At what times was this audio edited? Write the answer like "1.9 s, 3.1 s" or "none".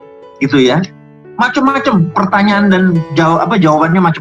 none